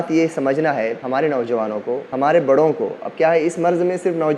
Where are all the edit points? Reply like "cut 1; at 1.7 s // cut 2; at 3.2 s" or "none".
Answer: cut 1; at 1.0 s // cut 2; at 2.1 s